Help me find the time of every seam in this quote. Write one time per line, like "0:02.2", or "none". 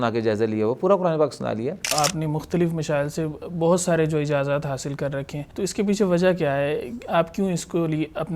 0:01.9
0:05.4